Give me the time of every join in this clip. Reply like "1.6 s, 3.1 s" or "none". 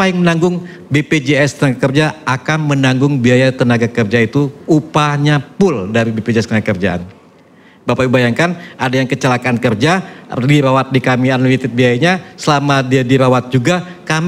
none